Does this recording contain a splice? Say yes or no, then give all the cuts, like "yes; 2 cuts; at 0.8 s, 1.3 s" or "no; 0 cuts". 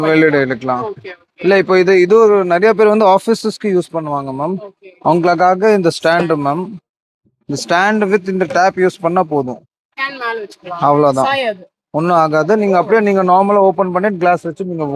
no; 0 cuts